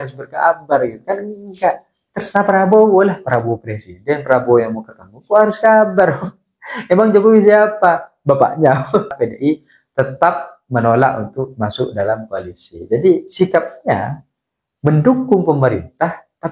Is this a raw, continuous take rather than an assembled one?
no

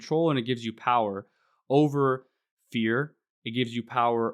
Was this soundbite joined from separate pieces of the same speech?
no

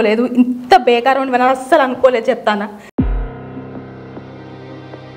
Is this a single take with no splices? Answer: yes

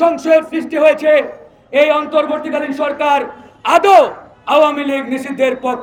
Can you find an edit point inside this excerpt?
no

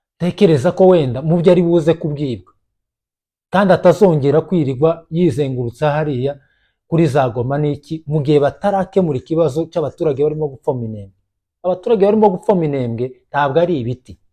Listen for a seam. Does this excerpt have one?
no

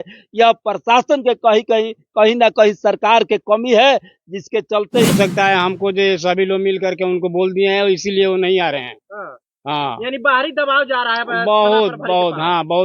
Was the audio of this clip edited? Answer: yes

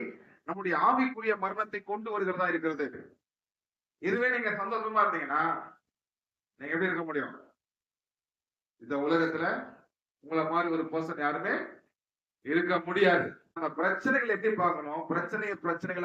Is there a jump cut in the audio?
yes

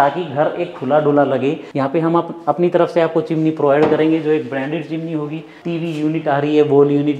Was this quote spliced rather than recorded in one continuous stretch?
yes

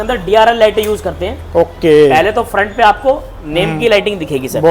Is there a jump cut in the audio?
no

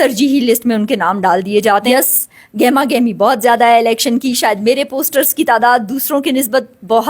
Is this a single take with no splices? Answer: no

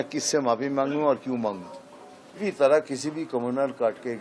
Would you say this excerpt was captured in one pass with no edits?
no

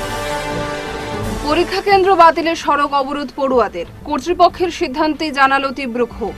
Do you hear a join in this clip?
yes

